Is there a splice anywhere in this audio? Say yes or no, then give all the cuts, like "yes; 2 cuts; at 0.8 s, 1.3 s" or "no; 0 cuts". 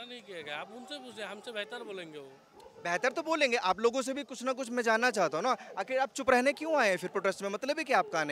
no; 0 cuts